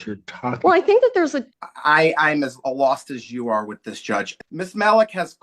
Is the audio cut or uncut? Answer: cut